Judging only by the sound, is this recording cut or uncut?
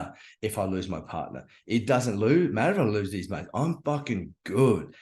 uncut